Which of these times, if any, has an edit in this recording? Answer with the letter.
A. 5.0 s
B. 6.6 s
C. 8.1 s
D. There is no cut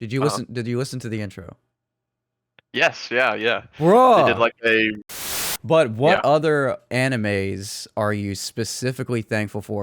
A